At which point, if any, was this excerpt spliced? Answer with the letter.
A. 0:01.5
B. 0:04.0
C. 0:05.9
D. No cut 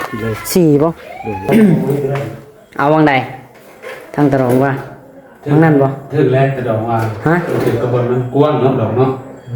A